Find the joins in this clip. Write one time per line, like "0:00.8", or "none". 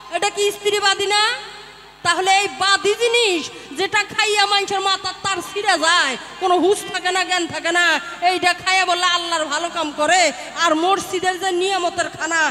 none